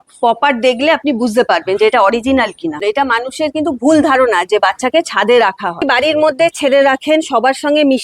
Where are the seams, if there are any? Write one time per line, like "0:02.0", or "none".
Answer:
0:02.8
0:05.8